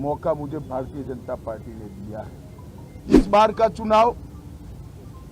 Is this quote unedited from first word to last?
no; 1 cut; at 3.0 s

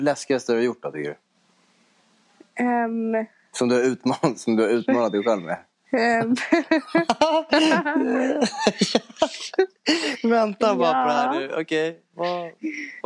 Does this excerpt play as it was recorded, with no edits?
yes; 0 cuts

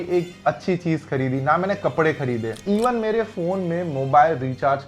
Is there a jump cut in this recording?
yes; 1 cut; at 2.6 s

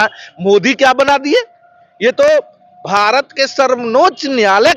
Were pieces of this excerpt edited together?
no; 0 cuts

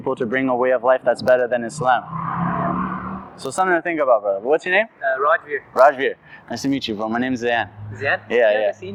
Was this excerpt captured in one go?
yes; 0 cuts

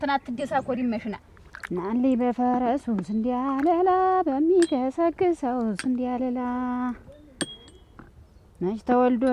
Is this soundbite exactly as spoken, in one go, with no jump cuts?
no; 1 cut; at 1.2 s

